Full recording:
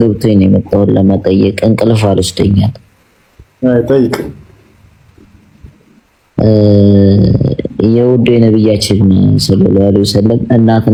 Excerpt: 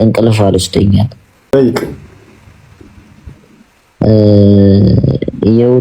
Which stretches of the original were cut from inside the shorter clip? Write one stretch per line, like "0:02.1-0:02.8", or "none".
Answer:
0:03.1-0:03.8